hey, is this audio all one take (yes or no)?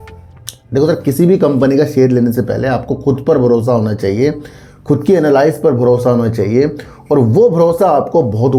yes